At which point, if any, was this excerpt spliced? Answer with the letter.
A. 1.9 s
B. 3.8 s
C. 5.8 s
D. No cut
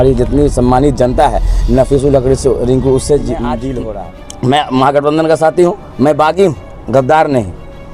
B